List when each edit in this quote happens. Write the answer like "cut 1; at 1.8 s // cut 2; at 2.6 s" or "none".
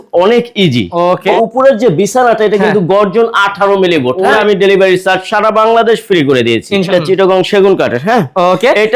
cut 1; at 1.3 s // cut 2; at 4.4 s // cut 3; at 6.8 s